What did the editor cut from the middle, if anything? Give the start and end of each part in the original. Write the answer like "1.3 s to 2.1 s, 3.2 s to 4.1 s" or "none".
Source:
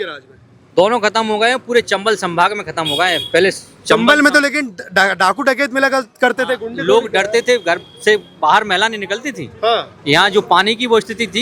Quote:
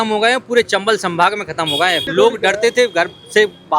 3.2 s to 6.7 s